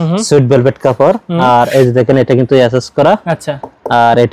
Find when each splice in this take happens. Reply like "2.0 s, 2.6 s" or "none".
none